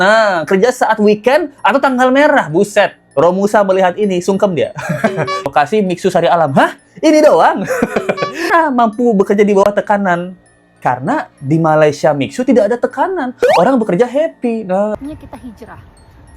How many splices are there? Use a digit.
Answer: 3